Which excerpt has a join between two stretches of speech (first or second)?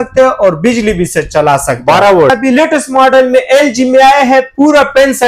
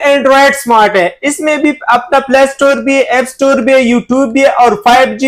first